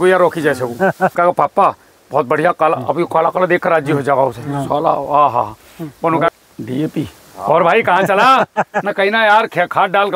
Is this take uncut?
no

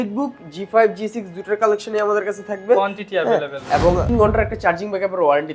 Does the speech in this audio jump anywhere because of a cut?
yes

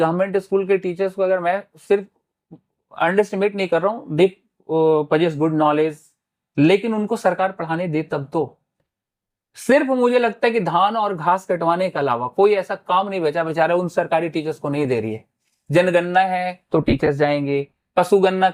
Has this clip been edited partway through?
no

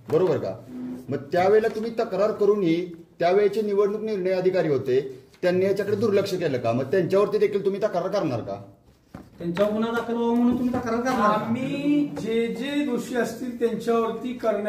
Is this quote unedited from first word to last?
yes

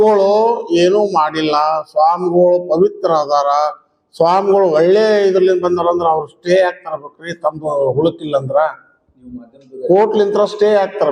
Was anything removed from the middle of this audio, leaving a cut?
no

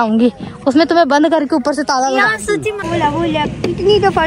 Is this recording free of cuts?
no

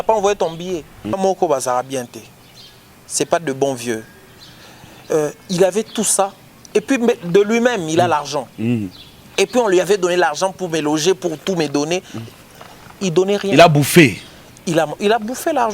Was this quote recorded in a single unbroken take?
no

